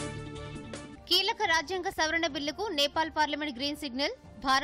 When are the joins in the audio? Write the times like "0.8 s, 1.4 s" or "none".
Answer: none